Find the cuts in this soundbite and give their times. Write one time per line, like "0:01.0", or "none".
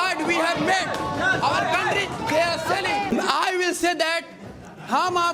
0:03.1